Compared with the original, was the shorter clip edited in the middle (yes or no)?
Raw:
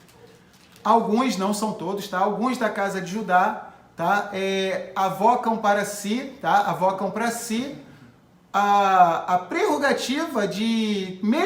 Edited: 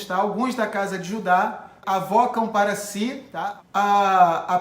yes